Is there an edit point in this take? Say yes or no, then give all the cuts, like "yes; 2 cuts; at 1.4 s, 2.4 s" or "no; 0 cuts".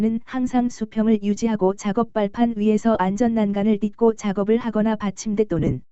yes; 1 cut; at 4.7 s